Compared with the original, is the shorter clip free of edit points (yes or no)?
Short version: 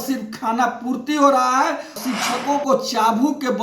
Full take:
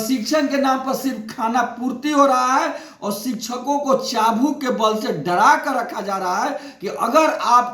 no